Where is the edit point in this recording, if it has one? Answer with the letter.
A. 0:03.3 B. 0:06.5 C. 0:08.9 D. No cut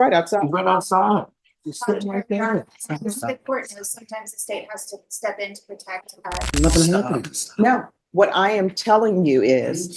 B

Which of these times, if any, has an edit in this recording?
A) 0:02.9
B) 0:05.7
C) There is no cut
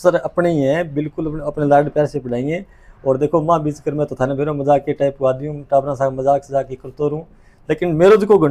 C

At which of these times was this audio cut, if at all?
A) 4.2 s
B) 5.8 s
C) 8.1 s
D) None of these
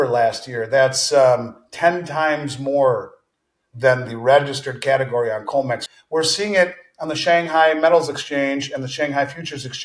B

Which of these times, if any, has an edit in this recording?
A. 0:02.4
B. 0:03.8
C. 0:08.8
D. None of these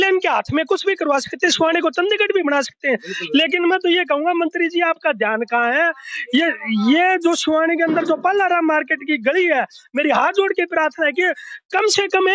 D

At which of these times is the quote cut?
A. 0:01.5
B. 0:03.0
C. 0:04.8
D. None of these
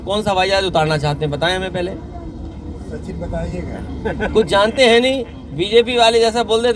D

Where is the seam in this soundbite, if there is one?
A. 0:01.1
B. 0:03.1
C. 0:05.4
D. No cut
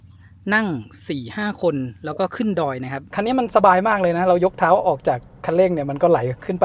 B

